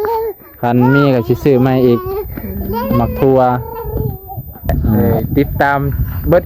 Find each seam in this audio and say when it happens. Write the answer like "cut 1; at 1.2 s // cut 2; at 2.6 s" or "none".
cut 1; at 5.0 s